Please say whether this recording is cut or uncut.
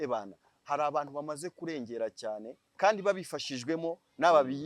cut